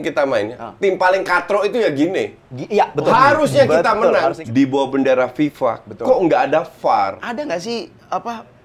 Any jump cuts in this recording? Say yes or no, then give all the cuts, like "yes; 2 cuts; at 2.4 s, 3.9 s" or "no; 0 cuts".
yes; 2 cuts; at 4.4 s, 7.2 s